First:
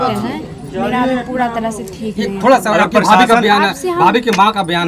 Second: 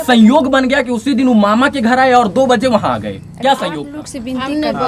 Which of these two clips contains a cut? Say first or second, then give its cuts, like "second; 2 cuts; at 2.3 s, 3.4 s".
second; 1 cut; at 3.8 s